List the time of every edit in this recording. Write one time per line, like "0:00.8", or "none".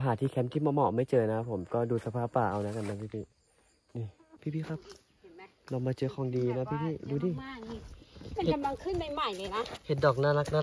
0:04.3

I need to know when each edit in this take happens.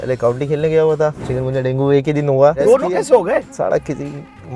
0:01.3
0:02.6
0:03.5

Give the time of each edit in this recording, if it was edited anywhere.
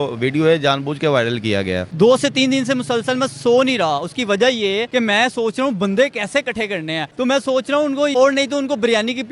0:01.8
0:04.9
0:07.0
0:08.1

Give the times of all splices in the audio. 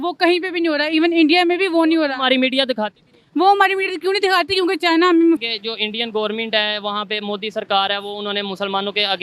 0:05.4

